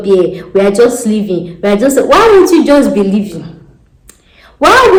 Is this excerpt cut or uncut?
uncut